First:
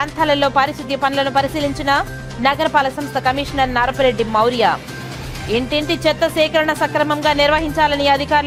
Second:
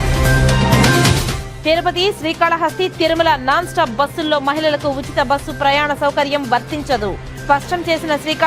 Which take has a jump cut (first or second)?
second